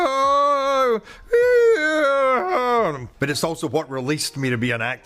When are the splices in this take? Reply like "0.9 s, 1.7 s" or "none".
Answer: 3.1 s